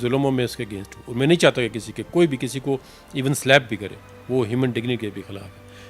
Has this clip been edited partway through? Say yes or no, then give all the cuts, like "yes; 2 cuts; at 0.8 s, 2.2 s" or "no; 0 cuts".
no; 0 cuts